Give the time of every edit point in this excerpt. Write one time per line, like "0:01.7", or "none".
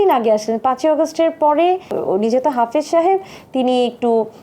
0:01.9